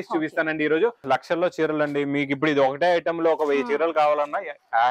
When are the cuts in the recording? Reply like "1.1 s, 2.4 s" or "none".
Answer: 1.0 s